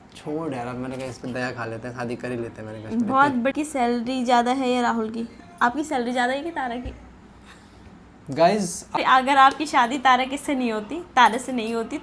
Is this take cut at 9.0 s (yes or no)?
yes